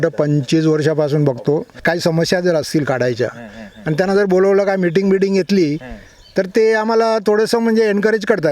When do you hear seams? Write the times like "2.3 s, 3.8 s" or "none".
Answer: 1.7 s